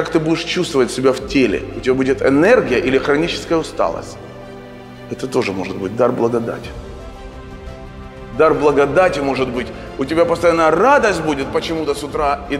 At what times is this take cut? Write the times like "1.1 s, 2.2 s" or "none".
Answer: none

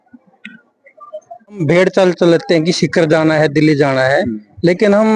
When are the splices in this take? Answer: 1.6 s

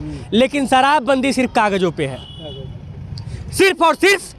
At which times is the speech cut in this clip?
none

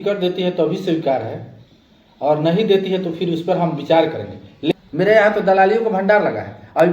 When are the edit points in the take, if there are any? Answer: 4.7 s

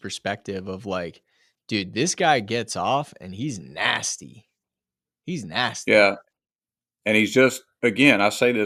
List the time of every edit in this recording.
none

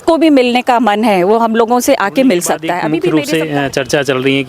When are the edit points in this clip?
3.1 s

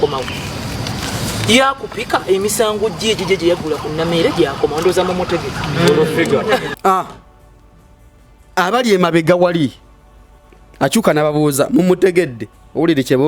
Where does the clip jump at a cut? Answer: none

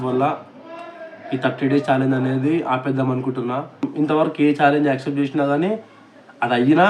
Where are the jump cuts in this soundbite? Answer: 3.9 s

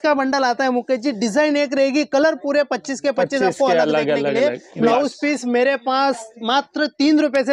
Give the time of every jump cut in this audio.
4.9 s

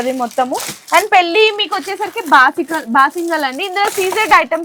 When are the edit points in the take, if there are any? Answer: none

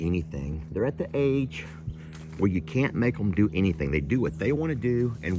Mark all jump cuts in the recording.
none

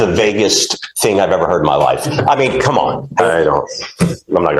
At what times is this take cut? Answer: 3.2 s

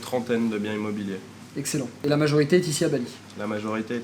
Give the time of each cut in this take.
1.9 s

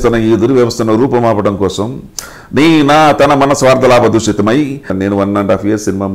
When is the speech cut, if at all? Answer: 4.9 s

